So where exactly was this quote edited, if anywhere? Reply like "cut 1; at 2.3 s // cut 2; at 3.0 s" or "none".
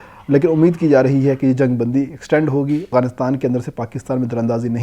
cut 1; at 2.9 s